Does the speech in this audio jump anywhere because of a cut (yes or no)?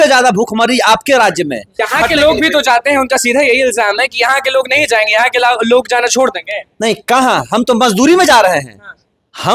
yes